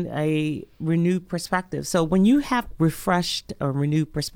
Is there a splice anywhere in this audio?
yes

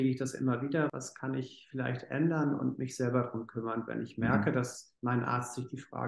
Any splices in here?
yes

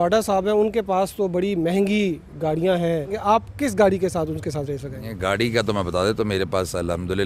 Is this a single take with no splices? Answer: no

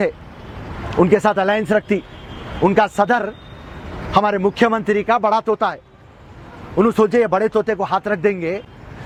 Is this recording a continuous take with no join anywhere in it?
yes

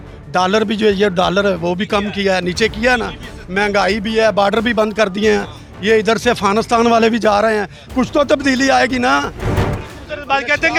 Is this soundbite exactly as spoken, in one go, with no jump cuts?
yes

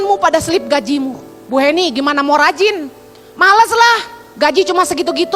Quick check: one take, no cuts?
yes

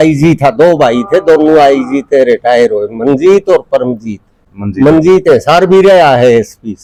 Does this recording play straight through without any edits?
yes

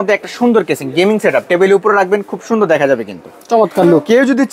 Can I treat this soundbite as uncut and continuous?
yes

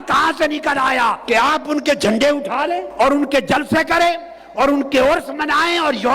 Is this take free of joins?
no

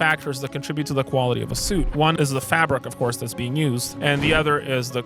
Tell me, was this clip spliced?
yes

